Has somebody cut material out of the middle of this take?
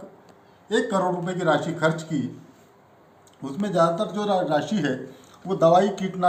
no; 0 cuts

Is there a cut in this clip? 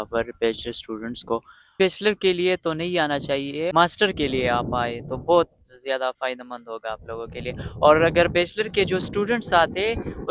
yes; 2 cuts; at 1.8 s, 3.7 s

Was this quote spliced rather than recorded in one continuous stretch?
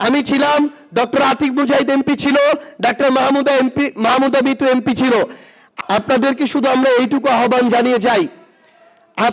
no; 0 cuts

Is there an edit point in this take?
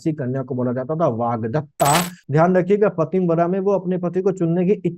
yes; 1 cut; at 2.2 s

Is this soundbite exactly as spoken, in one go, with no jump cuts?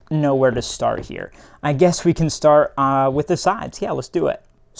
yes; 0 cuts

